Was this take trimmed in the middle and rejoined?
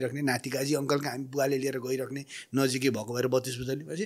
no; 0 cuts

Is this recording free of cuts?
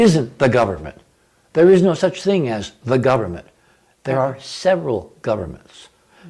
yes; 0 cuts

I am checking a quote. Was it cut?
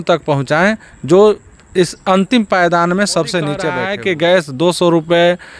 yes; 1 cut; at 3.8 s

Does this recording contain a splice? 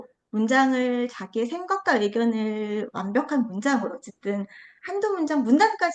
no; 0 cuts

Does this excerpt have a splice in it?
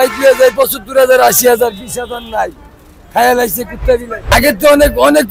yes; 1 cut; at 4.3 s

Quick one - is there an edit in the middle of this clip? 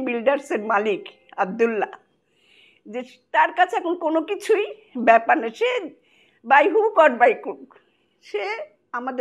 no; 0 cuts

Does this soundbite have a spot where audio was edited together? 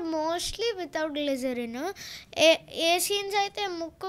no; 0 cuts

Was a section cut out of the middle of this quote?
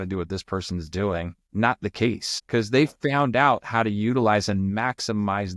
yes; 1 cut; at 1.4 s

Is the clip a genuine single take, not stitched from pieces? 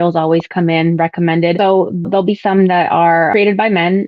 no; 2 cuts; at 2.0 s, 3.3 s

